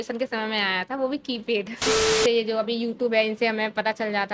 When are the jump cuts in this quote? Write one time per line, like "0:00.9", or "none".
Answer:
0:02.2